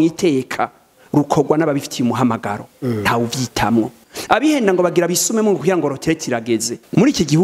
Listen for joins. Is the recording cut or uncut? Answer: uncut